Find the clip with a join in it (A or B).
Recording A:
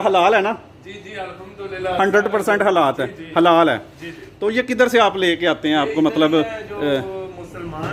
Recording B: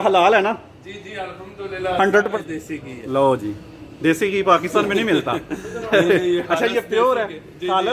B